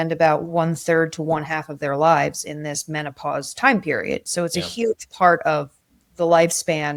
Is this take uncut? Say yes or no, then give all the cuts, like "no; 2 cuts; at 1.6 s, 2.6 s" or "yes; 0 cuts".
yes; 0 cuts